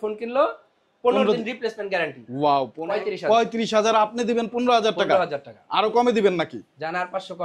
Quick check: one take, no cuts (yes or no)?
no